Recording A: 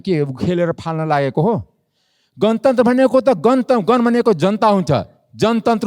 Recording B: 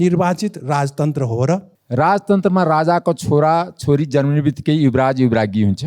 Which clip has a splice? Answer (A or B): B